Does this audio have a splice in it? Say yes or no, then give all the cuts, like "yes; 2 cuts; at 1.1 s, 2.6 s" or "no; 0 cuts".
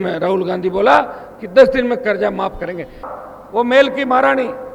yes; 1 cut; at 3.1 s